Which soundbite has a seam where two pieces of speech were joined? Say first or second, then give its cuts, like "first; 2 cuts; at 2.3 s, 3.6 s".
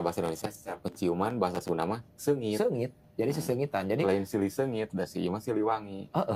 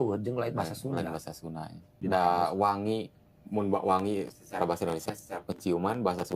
second; 1 cut; at 1.9 s